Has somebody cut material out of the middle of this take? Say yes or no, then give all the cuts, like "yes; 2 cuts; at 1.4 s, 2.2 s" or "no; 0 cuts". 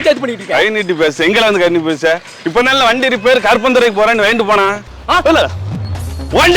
yes; 1 cut; at 4.9 s